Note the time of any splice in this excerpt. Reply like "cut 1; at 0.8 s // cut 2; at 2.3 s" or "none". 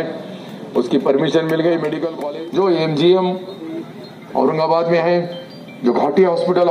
cut 1; at 2.1 s